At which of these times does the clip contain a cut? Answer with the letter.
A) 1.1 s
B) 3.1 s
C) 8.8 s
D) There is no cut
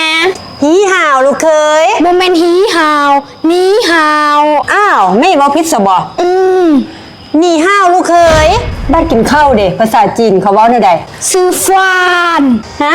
C